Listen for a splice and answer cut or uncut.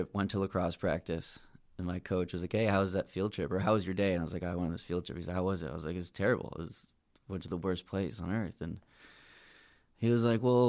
uncut